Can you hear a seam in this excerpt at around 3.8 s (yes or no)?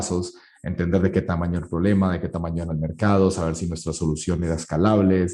no